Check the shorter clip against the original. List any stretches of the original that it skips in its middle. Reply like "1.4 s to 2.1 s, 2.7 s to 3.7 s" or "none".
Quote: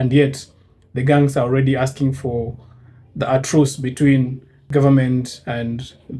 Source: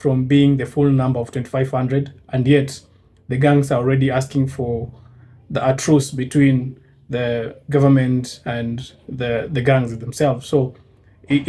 6.9 s to 7.5 s